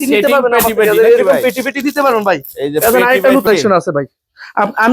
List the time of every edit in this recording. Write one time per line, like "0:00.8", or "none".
0:03.5

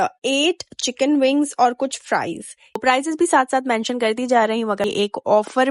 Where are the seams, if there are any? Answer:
0:02.8
0:04.8

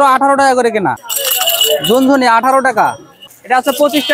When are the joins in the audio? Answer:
0:01.1
0:03.2

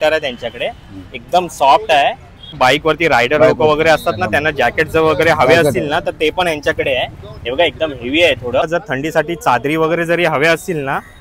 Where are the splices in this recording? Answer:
0:02.6
0:08.7

